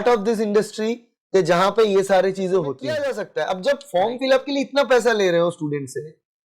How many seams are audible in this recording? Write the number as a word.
one